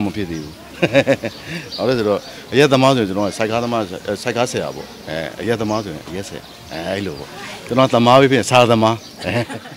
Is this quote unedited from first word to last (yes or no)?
yes